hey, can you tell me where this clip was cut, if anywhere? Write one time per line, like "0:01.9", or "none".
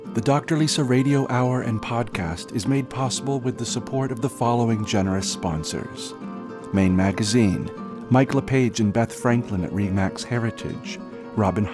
none